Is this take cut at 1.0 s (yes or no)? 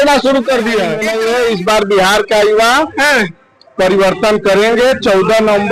yes